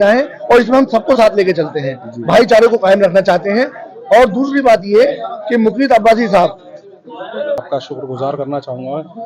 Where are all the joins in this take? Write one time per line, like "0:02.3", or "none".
0:07.6